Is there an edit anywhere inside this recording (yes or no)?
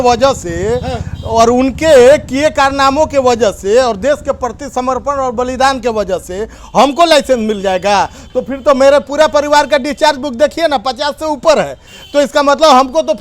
no